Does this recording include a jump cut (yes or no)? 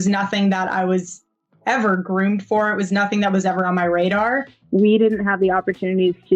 yes